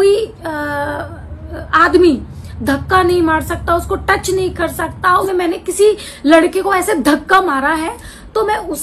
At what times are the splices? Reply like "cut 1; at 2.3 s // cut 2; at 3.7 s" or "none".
cut 1; at 5.2 s